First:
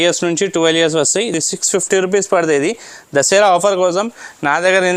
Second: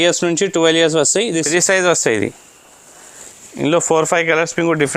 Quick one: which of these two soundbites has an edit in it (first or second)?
second